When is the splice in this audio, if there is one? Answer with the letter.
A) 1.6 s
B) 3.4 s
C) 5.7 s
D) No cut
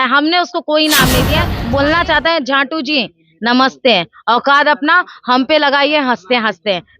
A